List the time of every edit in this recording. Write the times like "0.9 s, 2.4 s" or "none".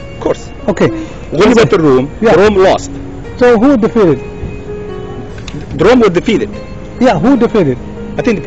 1.2 s